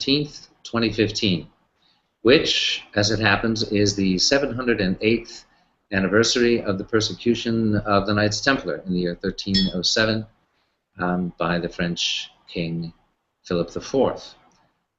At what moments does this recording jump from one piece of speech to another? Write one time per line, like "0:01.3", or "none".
0:09.0